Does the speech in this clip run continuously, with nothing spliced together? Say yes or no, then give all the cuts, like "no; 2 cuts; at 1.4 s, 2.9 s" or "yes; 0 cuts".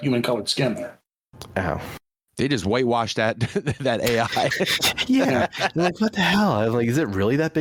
yes; 0 cuts